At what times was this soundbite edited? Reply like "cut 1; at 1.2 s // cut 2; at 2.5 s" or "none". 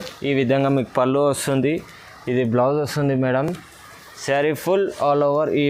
none